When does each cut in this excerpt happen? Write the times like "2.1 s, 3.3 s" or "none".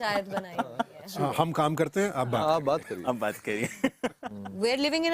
4.3 s